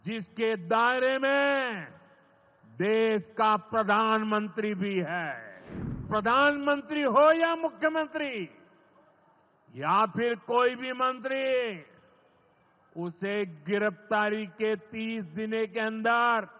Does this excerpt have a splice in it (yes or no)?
yes